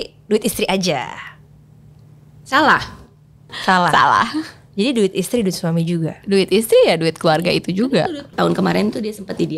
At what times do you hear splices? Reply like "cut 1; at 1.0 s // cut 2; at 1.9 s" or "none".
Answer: cut 1; at 3.5 s // cut 2; at 8.3 s